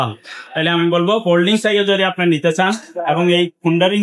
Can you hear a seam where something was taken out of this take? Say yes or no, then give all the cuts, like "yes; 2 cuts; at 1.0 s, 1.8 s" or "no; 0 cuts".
no; 0 cuts